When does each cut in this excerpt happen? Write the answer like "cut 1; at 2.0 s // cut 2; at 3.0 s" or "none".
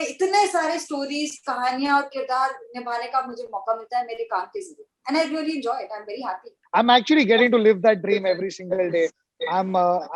cut 1; at 6.5 s